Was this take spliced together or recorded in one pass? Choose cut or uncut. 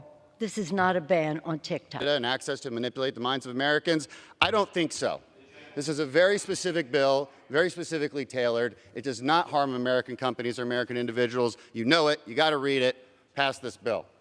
cut